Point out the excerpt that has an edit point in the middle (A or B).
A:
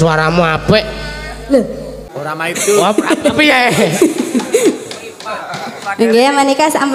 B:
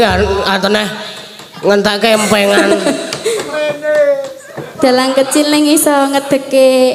A